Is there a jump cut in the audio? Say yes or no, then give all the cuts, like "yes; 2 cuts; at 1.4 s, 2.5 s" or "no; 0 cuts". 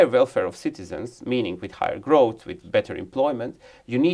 no; 0 cuts